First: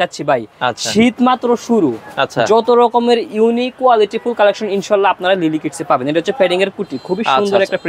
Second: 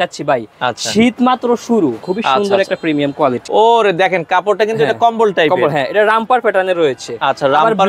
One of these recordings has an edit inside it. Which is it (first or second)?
second